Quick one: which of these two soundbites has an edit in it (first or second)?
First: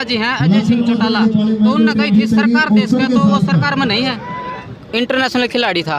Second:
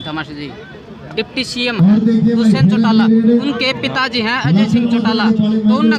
first